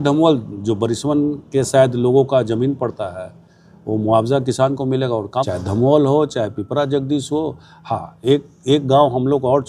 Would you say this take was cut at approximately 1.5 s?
no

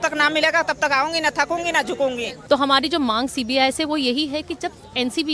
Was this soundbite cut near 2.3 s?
yes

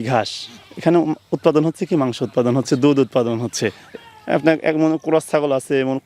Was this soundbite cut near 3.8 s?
yes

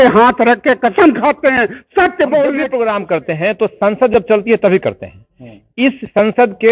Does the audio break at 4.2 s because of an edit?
no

